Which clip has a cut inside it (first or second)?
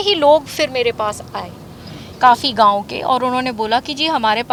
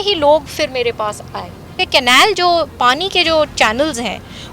second